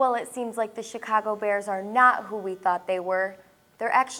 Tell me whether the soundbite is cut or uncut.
uncut